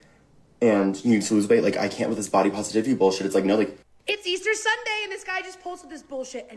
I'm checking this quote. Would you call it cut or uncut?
cut